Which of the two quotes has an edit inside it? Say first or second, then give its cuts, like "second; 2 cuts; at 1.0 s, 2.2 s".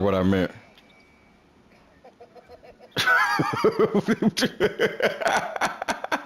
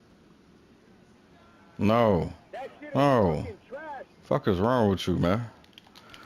first; 1 cut; at 5.3 s